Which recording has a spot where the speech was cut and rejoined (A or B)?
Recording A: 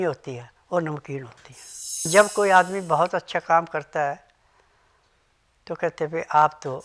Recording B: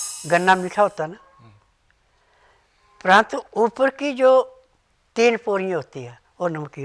A